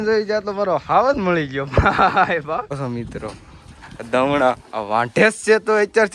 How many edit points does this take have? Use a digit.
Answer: 1